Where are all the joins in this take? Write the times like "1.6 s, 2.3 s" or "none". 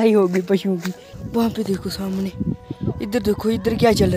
1.1 s, 2.7 s